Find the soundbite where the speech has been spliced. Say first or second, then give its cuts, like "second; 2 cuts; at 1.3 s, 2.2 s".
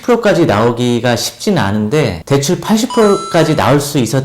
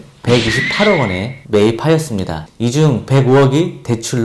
first; 1 cut; at 2.2 s